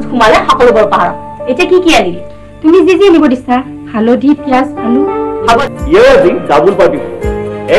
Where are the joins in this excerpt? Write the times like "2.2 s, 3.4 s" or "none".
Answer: 5.6 s